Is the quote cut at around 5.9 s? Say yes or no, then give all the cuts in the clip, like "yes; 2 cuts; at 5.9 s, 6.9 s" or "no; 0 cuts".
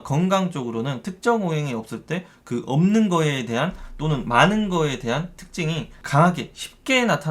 yes; 1 cut; at 5.9 s